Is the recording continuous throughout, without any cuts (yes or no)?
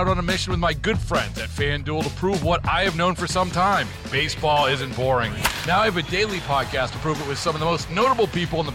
yes